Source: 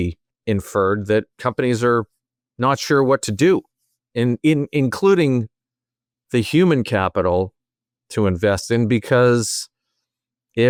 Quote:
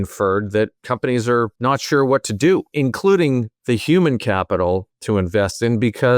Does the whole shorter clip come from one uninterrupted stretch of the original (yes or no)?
no